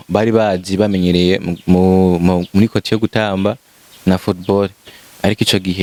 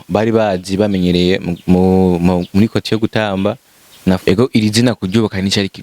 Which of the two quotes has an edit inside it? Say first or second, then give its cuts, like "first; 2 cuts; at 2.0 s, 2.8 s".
second; 1 cut; at 4.2 s